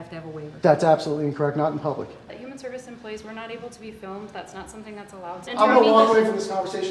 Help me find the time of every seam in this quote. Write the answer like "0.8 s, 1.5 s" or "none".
2.2 s, 5.5 s